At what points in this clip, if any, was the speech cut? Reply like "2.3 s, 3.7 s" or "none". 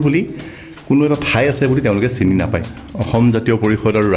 2.6 s

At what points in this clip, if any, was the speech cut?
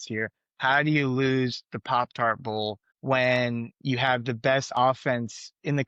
none

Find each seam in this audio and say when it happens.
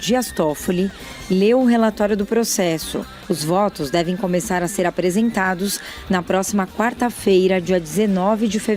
3.1 s

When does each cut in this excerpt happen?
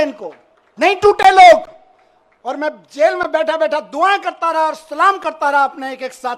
none

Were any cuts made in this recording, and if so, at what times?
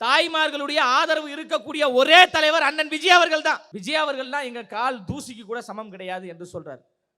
3.7 s

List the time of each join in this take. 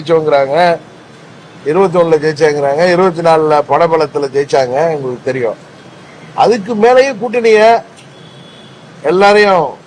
none

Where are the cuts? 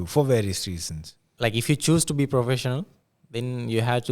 1.3 s

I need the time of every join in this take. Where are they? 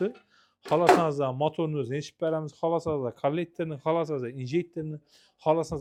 none

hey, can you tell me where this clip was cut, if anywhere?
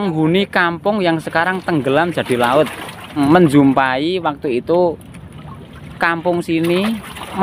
3.2 s

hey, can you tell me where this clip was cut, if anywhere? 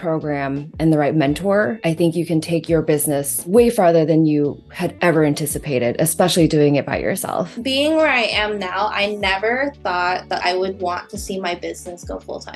1.8 s, 3.5 s, 7.6 s, 10.4 s

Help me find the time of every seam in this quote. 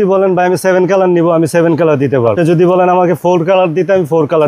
2.3 s

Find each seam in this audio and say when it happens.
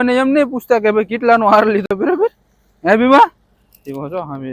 none

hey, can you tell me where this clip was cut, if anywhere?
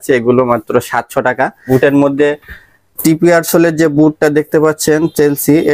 1.7 s

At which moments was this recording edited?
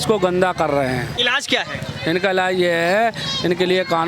1.1 s

